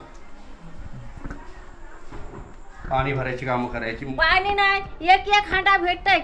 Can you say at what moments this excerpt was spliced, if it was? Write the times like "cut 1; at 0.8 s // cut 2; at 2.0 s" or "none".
cut 1; at 4.1 s